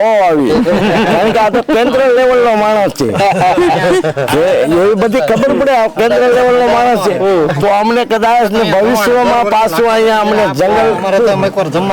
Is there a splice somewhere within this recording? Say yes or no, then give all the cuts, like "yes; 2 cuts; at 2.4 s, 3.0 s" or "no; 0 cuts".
no; 0 cuts